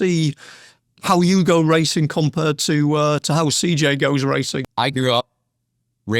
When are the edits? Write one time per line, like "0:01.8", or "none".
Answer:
0:04.6